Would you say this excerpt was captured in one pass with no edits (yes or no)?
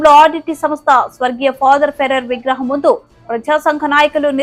yes